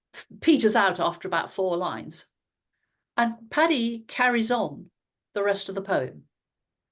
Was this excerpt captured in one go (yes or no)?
yes